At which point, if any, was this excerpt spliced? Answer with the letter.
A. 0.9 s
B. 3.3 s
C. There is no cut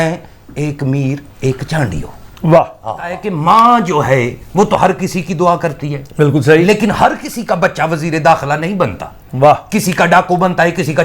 B